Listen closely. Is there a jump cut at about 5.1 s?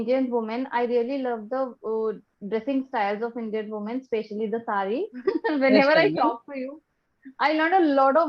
yes; 1 cut; at 5.1 s

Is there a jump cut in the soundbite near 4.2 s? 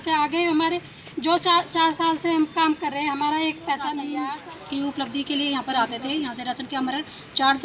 yes; 1 cut; at 4.2 s

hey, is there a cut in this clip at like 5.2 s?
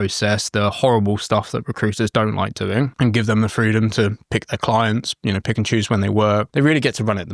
no; 2 cuts; at 2.9 s, 6.5 s

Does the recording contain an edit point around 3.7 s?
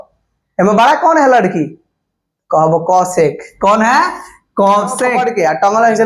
no; 1 cut; at 5.2 s

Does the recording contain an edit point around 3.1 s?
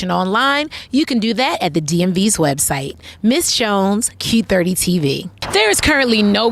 no; 1 cut; at 5.3 s

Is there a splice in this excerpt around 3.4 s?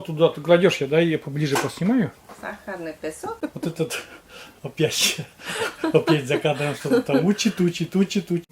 yes; 1 cut; at 3.4 s

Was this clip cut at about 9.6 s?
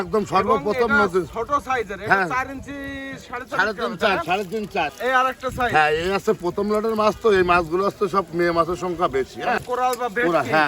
yes; 2 cuts; at 4.9 s, 9.6 s

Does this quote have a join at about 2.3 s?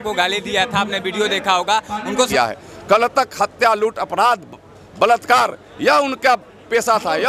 yes; 1 cut; at 2.3 s

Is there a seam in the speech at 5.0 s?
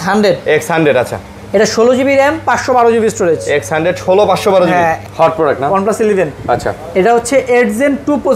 yes; 1 cut; at 5.0 s

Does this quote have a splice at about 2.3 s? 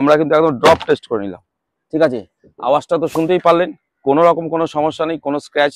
no; 0 cuts

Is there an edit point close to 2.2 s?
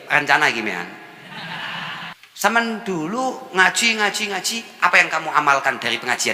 yes; 1 cut; at 2.2 s

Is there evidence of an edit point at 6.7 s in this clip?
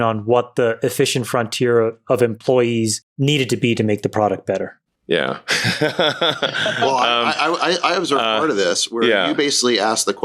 no; 2 cuts; at 3.0 s, 4.8 s

